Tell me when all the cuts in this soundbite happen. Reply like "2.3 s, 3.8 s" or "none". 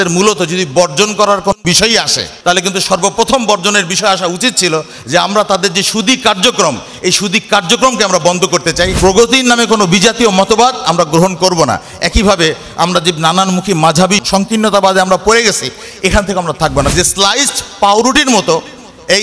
2.3 s, 8.9 s, 14.2 s, 16.9 s